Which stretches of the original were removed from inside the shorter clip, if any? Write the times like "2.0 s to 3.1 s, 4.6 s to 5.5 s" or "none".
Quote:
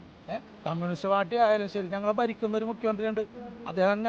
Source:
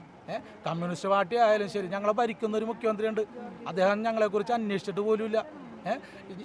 none